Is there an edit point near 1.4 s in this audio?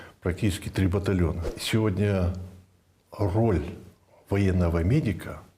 yes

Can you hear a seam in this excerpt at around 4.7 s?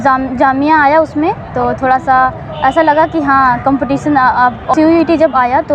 yes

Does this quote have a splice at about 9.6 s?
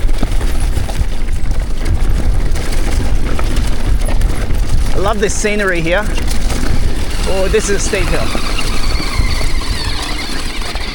no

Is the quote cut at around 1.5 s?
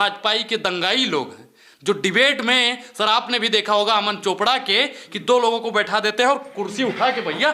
no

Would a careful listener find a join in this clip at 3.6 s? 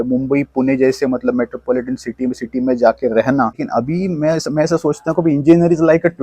yes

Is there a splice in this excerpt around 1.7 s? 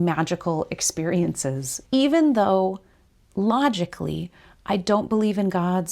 yes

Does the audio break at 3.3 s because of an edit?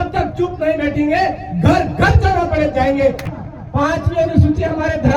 yes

